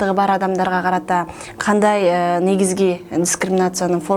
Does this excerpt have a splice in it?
no; 0 cuts

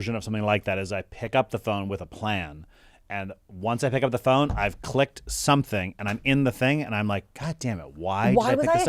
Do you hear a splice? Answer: no; 0 cuts

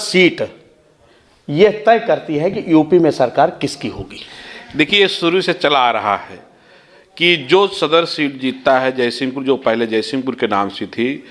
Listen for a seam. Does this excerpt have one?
no; 0 cuts

